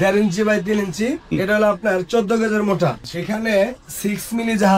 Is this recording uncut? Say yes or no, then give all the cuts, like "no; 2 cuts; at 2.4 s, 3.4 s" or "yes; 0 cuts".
no; 2 cuts; at 1.3 s, 3.1 s